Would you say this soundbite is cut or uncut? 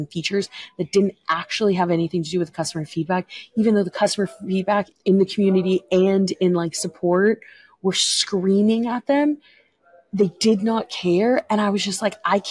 cut